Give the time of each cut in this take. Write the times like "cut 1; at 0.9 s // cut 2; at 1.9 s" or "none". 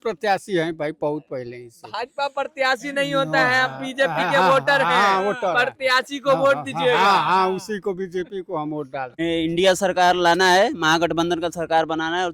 cut 1; at 9.1 s